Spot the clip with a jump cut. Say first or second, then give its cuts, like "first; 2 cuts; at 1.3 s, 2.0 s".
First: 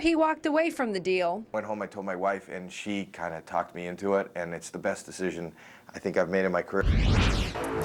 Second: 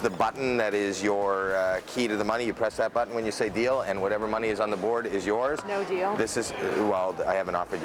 first; 1 cut; at 6.8 s